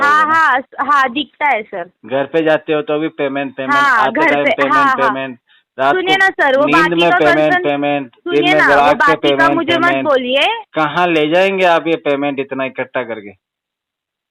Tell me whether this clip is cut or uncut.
uncut